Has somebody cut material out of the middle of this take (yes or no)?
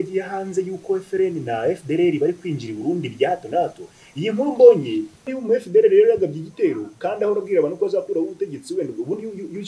yes